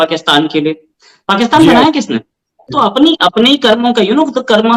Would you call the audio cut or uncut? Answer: uncut